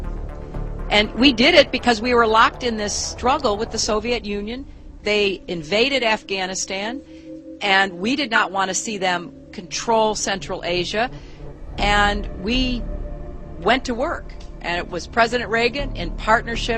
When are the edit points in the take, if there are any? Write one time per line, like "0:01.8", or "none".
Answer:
0:07.8